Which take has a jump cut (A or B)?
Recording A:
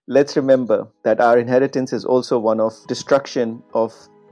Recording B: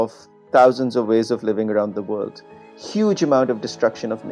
A